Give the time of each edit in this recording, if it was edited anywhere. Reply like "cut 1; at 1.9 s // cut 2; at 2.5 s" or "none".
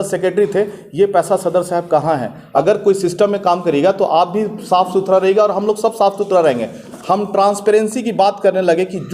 cut 1; at 2.4 s // cut 2; at 6.9 s

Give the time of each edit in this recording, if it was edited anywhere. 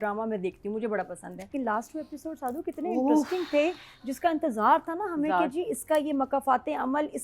cut 1; at 1.5 s

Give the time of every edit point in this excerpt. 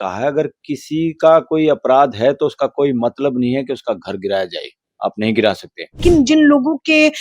cut 1; at 6.0 s

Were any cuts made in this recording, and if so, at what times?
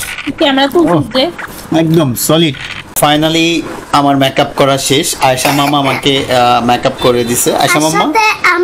cut 1; at 2.8 s

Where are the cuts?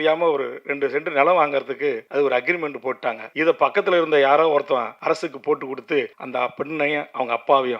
cut 1; at 2.0 s // cut 2; at 3.2 s // cut 3; at 4.9 s // cut 4; at 6.2 s

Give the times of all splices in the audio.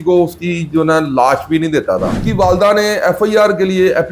cut 1; at 2.2 s

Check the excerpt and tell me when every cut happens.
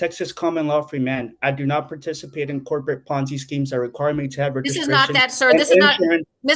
none

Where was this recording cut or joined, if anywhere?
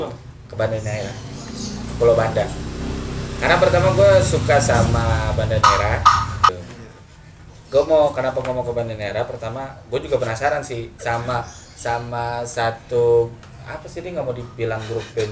cut 1; at 6.5 s

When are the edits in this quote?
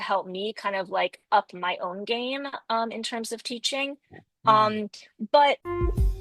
none

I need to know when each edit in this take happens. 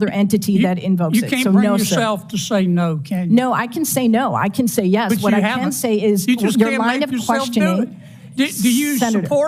none

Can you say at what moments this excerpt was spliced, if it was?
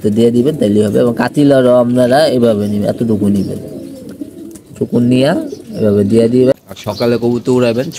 cut 1; at 6.5 s

